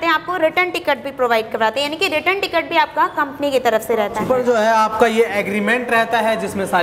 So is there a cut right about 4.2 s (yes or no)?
yes